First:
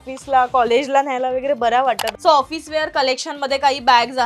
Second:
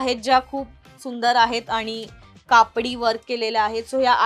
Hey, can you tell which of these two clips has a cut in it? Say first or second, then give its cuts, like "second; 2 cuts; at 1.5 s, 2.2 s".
first; 1 cut; at 2.1 s